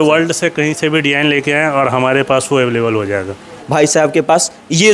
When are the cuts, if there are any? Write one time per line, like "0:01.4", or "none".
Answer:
0:03.5